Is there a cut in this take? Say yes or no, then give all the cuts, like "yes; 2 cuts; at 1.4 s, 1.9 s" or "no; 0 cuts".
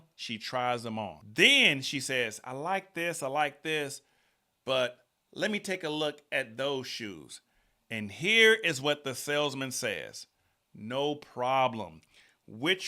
yes; 1 cut; at 1.2 s